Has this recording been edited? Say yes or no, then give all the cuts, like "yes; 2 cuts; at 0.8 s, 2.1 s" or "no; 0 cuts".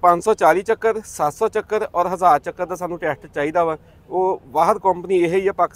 no; 0 cuts